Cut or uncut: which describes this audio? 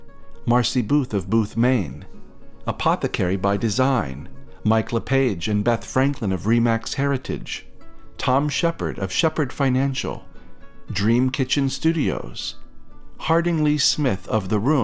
uncut